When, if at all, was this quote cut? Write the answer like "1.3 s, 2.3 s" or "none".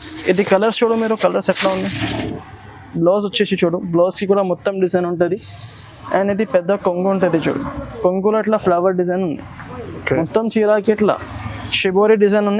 2.3 s